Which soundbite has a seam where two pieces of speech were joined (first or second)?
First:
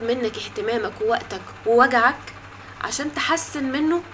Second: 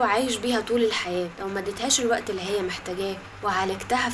second